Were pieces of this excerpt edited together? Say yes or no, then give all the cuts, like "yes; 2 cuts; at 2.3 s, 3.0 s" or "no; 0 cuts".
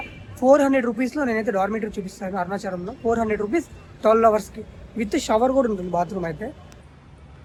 no; 0 cuts